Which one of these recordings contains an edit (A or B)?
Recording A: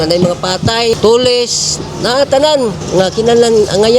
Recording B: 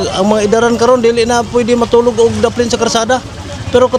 A